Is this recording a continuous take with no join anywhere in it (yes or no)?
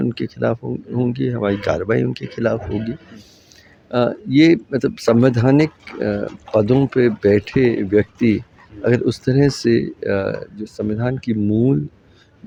yes